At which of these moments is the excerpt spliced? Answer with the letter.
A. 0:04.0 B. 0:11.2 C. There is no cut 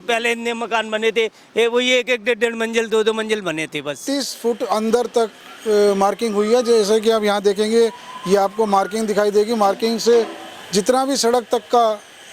A